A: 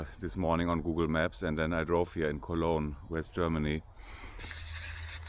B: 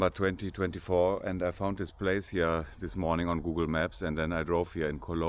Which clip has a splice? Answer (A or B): A